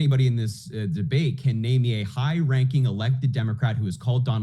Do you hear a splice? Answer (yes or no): no